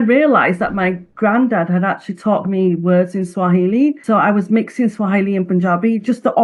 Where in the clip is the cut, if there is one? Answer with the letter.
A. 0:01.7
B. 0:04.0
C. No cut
B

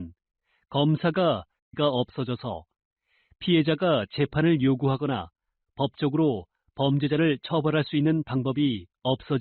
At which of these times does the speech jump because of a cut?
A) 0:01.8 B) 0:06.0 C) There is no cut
A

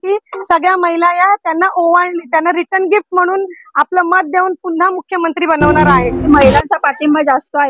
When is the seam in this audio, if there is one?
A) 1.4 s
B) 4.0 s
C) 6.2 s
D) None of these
C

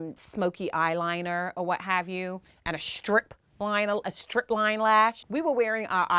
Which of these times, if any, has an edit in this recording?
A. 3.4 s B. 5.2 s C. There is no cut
B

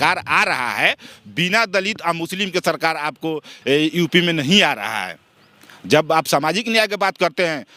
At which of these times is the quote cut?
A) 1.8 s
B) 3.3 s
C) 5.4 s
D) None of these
D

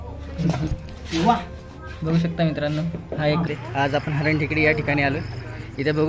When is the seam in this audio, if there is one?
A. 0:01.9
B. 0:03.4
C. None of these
B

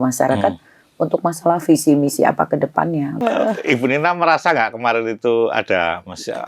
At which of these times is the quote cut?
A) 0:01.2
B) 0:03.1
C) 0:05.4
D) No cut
B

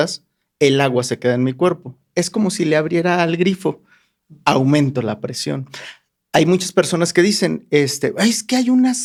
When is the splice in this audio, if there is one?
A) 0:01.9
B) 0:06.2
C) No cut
C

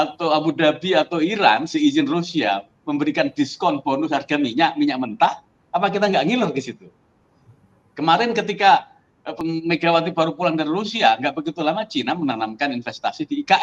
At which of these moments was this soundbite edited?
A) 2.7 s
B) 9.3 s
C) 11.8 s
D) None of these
B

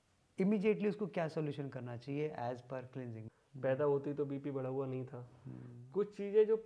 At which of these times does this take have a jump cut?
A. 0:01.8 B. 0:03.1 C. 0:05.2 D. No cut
B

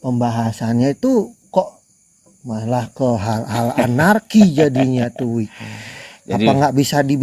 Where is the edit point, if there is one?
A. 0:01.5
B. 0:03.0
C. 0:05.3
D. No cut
D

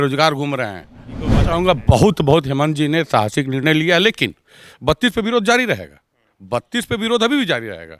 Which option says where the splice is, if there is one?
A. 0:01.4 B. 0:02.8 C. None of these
A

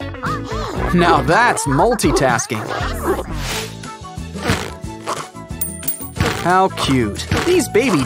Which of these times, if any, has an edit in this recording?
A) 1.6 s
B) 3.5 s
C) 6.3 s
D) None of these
B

